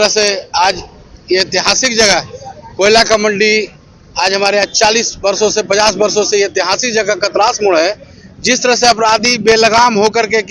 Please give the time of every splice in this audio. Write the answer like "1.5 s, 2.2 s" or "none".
none